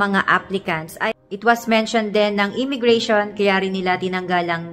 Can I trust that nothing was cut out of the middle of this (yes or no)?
no